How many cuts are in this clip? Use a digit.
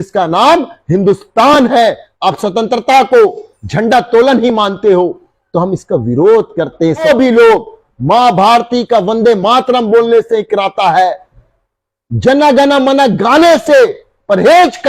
2